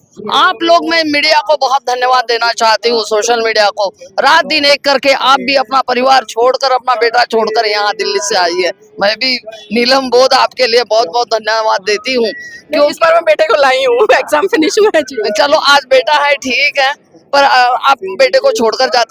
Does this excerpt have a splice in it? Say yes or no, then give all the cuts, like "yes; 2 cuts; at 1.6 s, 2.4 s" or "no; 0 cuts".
no; 0 cuts